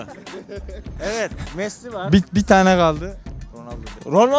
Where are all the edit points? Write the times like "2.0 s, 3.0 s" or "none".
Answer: none